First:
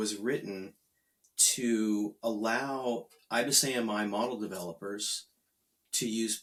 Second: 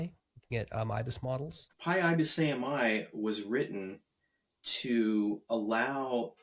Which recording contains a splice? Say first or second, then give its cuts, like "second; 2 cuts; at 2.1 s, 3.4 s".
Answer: second; 1 cut; at 1.4 s